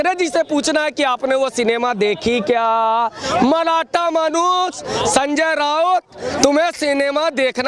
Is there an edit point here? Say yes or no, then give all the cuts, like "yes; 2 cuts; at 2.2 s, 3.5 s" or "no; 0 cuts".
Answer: no; 0 cuts